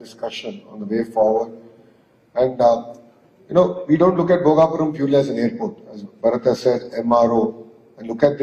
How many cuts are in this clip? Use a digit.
1